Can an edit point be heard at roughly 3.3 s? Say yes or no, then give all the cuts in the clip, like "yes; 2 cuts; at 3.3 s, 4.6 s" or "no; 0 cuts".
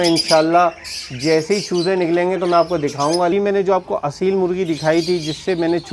yes; 1 cut; at 3.3 s